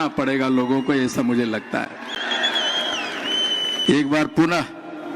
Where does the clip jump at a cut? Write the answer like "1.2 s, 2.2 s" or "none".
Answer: none